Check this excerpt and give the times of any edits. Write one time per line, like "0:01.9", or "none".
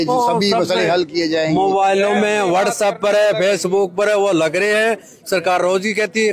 none